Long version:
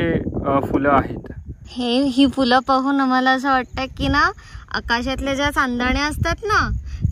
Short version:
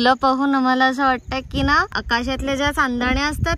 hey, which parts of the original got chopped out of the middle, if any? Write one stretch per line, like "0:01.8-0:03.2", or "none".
0:04.4-0:04.7